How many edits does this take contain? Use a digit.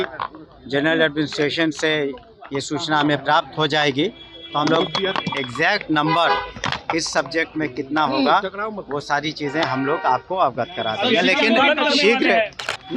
0